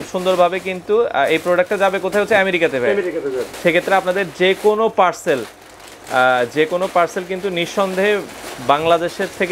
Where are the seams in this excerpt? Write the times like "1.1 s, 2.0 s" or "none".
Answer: 3.5 s